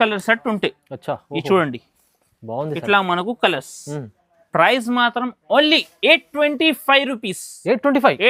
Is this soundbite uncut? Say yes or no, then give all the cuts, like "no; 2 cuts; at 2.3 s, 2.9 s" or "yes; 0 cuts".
yes; 0 cuts